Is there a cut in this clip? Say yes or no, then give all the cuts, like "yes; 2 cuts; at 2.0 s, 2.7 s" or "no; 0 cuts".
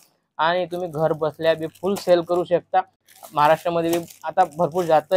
no; 0 cuts